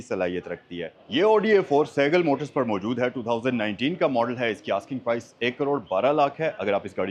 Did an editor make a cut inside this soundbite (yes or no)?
no